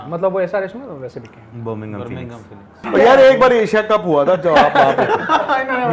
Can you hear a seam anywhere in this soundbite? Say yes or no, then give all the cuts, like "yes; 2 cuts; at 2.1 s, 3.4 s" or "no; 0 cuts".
yes; 1 cut; at 2.8 s